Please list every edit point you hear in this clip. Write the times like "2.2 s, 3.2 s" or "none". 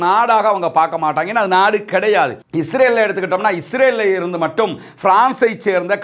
2.4 s